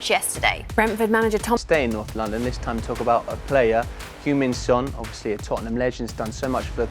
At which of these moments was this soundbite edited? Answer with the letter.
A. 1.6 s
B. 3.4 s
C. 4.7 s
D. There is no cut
A